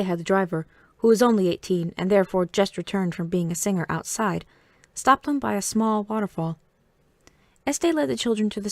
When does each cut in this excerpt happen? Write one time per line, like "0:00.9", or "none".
0:05.9